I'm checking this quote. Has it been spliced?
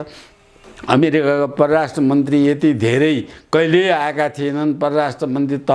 no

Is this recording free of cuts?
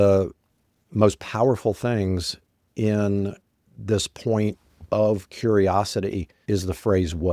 no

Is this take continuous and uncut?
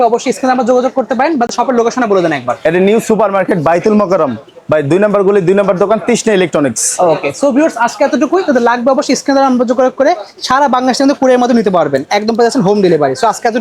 yes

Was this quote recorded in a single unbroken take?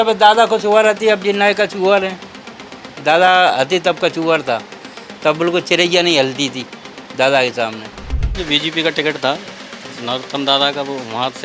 no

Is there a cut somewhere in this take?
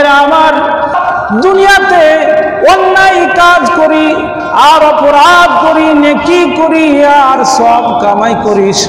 yes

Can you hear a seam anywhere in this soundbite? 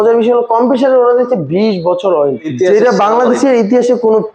yes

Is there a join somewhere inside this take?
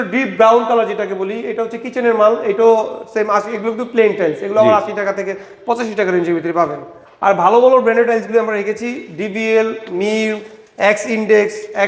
no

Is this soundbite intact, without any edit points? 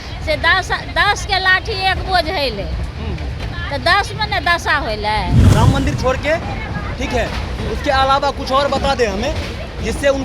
no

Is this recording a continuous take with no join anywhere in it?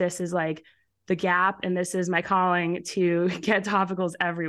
yes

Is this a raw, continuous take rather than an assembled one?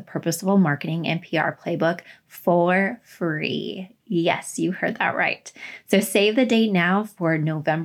yes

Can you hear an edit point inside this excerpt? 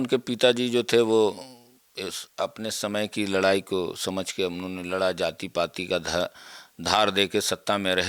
no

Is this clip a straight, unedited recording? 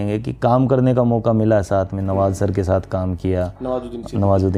yes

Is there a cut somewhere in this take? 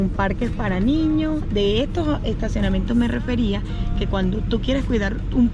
no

